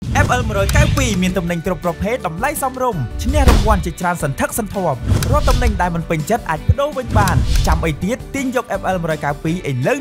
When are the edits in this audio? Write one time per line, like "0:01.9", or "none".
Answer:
none